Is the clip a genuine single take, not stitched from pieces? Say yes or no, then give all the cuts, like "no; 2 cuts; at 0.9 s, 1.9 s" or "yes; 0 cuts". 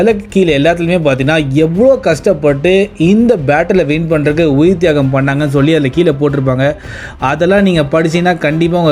yes; 0 cuts